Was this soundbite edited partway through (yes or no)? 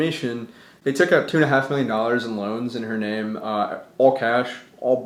no